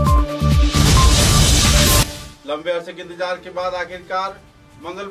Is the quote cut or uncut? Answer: cut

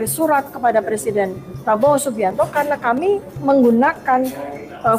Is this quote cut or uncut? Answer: uncut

